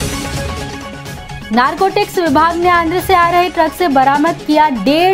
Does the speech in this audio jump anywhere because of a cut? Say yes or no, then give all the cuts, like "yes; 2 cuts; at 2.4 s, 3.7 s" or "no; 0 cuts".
yes; 1 cut; at 1.1 s